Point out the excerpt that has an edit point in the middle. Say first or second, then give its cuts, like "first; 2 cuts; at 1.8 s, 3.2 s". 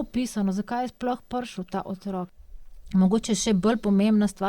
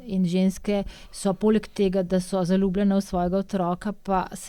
first; 1 cut; at 2.2 s